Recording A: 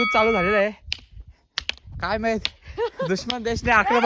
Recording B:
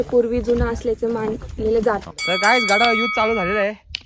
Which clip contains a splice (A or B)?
B